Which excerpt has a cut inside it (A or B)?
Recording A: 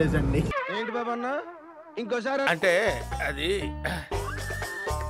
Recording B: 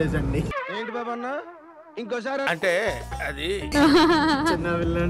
B